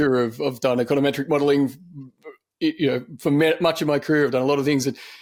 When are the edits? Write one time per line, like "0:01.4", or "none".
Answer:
none